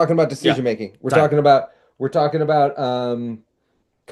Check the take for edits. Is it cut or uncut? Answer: uncut